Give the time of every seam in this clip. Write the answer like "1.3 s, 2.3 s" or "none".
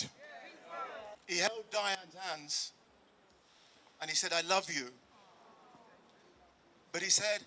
1.1 s